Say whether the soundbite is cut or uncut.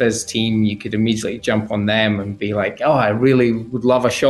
uncut